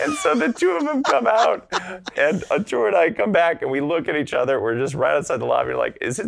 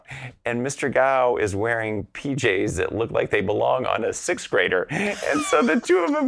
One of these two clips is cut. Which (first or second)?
first